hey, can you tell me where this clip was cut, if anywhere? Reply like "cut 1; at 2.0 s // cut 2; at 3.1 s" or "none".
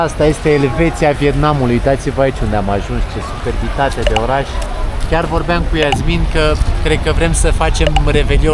none